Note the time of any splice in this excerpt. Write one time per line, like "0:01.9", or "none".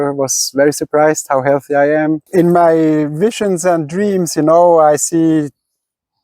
0:02.2